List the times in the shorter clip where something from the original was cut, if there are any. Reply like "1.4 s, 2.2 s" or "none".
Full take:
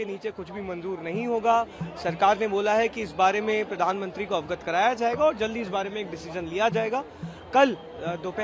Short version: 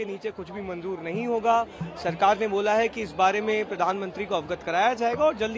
none